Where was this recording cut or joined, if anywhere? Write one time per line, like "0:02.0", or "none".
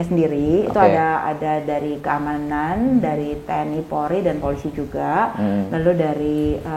none

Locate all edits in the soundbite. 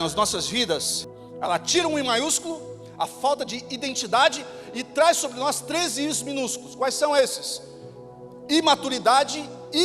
0:01.0

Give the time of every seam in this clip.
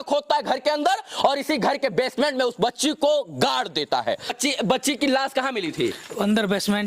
0:04.4

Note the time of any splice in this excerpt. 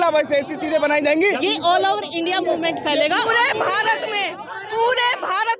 0:01.4
0:03.3

